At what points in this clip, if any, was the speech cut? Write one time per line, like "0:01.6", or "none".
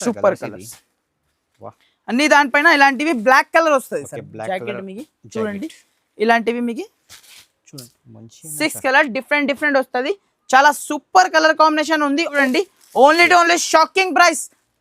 0:12.3